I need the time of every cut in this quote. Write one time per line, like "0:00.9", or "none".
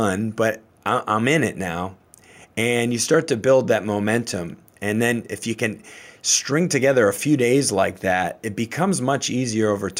none

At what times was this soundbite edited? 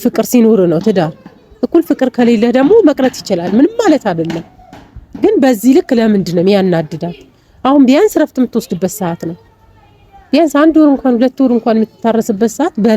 none

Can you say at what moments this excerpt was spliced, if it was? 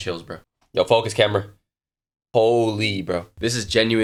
none

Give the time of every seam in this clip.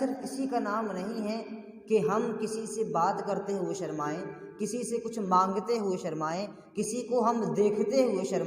none

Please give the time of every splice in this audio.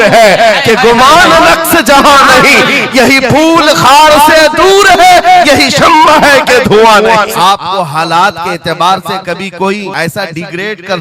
0:07.3
0:09.9

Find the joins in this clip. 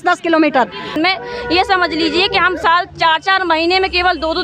0:01.0

